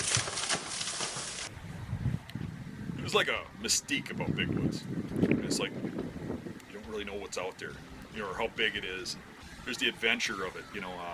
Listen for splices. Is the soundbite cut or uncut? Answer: cut